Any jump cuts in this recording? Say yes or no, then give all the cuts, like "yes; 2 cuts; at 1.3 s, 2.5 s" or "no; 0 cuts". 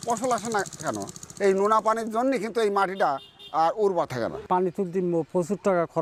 no; 0 cuts